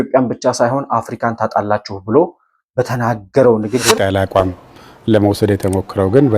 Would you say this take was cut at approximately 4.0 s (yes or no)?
yes